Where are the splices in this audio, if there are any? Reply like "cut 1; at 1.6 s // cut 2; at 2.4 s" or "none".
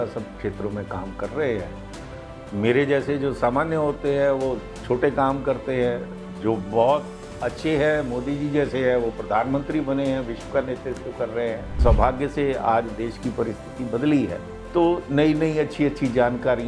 cut 1; at 11.8 s